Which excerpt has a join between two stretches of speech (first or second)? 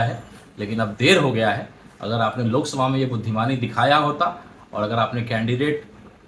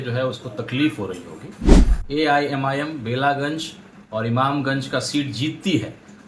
second